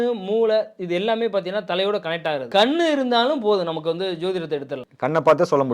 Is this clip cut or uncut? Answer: cut